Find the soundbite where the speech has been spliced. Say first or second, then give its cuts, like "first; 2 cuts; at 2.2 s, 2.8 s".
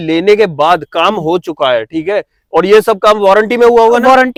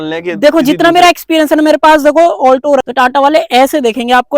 second; 1 cut; at 2.8 s